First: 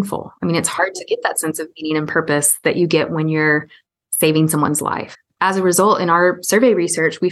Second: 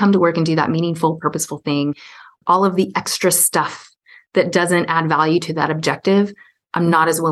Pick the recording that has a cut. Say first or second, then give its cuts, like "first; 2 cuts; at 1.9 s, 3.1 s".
second; 1 cut; at 2.4 s